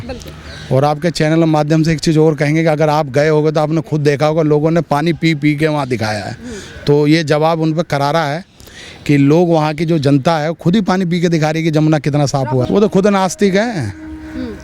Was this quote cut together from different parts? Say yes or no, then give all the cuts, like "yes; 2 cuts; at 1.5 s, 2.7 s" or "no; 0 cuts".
yes; 1 cut; at 12.7 s